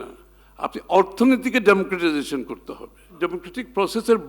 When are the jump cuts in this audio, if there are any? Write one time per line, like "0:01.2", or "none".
0:03.0